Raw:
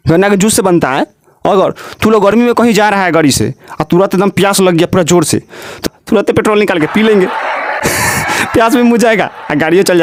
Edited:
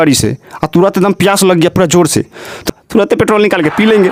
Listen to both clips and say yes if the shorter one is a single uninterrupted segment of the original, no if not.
yes